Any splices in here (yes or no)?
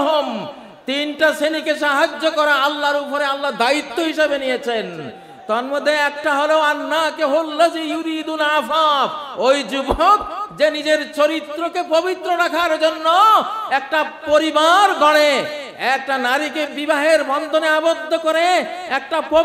no